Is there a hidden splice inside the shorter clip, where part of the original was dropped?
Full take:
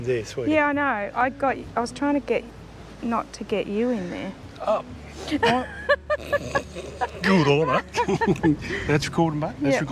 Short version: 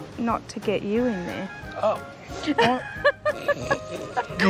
no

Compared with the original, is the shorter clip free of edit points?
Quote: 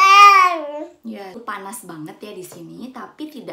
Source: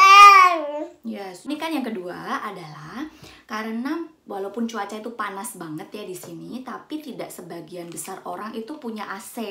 no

